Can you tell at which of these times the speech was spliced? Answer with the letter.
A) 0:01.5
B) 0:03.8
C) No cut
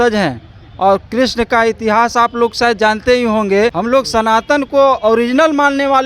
B